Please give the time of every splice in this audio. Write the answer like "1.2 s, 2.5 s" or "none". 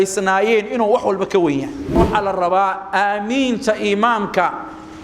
2.0 s

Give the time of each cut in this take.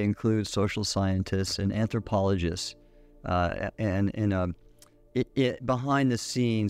none

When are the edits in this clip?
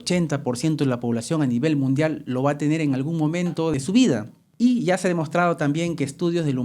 3.7 s, 4.4 s

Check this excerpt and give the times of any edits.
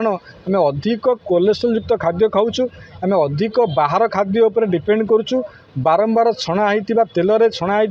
none

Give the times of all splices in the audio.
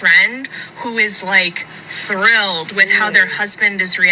none

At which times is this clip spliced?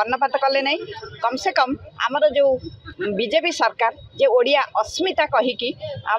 none

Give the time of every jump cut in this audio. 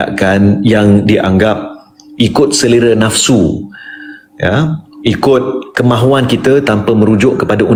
none

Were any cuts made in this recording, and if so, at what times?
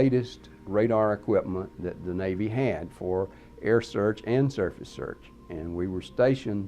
4.0 s

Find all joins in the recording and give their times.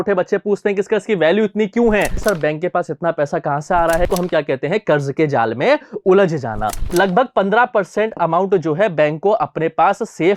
2.2 s, 4.1 s, 6.8 s

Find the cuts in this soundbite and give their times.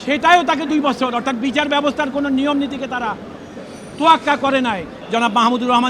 4.9 s

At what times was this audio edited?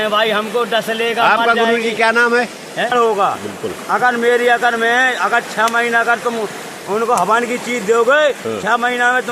2.9 s

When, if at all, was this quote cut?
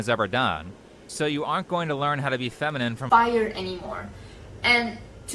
3.0 s

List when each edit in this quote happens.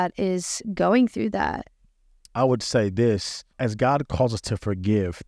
none

